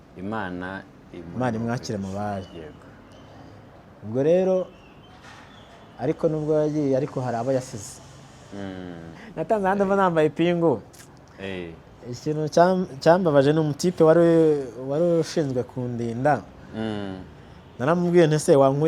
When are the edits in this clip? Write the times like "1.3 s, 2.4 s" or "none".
9.1 s